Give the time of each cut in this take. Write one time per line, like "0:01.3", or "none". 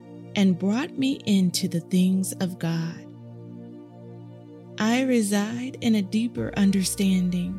0:03.0
0:04.4